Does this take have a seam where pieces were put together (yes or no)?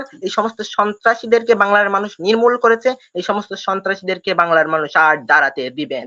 no